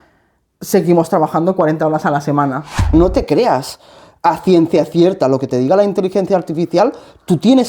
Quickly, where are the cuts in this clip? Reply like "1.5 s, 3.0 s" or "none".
2.9 s